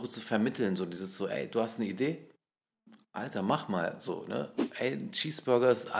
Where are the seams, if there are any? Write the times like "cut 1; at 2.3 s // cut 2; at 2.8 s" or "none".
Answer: cut 1; at 4.7 s